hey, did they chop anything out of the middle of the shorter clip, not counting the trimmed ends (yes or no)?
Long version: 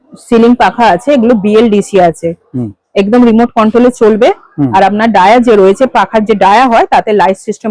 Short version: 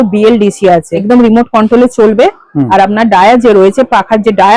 yes